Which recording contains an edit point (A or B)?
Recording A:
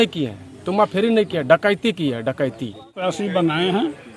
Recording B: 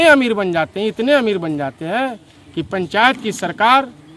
A